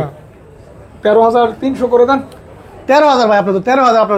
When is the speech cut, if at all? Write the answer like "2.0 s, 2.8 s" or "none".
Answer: none